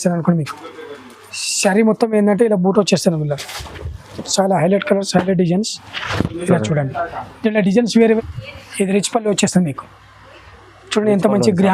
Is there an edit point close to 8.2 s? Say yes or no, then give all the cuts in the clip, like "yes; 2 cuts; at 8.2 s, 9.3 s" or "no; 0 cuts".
yes; 1 cut; at 8.2 s